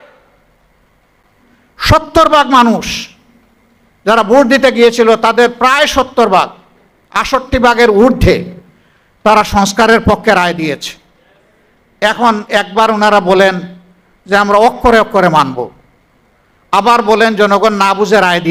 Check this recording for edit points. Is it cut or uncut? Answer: uncut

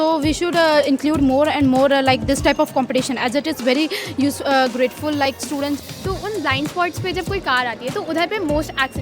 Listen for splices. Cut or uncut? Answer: cut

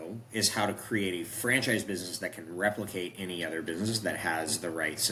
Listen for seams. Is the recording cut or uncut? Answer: uncut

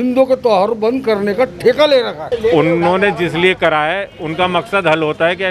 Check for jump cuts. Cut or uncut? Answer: cut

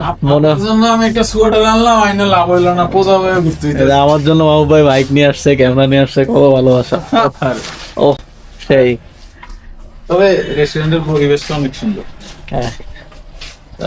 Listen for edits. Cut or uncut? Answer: uncut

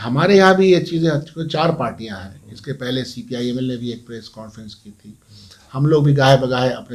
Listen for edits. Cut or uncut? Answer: uncut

